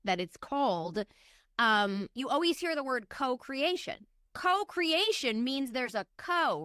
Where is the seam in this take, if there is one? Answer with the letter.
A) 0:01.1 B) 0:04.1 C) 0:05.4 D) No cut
B